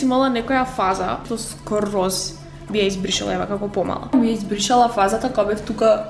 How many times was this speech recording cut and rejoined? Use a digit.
2